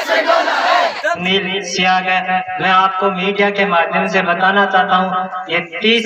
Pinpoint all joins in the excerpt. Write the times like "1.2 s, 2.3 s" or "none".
1.2 s

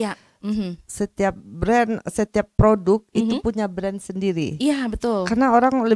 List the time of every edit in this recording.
none

